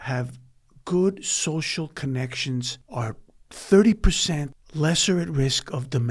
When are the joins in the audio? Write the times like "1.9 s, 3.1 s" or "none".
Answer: 2.8 s, 4.6 s